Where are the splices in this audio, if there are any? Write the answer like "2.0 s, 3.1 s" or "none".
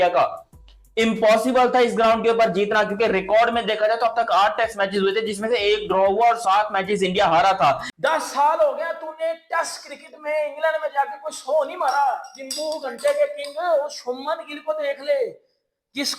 7.9 s